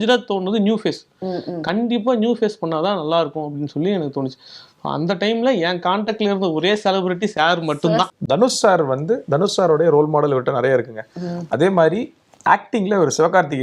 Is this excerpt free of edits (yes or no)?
no